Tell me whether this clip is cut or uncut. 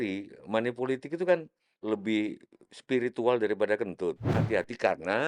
cut